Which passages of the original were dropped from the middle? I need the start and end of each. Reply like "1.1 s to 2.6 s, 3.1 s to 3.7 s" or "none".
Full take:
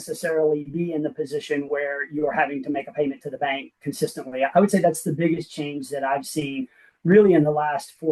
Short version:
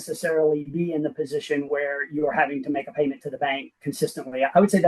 none